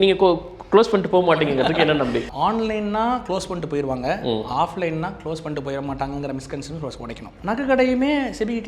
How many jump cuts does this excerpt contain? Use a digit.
2